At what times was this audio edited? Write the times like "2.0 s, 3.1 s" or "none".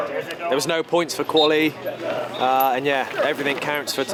none

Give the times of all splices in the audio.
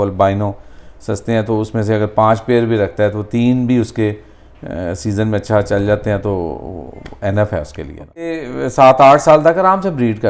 8.4 s

